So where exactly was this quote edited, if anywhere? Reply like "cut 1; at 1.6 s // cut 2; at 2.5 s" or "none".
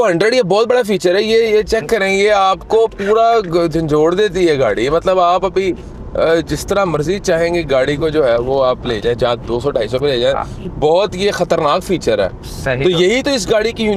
none